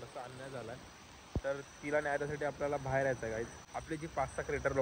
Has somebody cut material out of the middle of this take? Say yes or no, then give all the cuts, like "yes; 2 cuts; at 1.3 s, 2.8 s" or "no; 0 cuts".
yes; 1 cut; at 3.7 s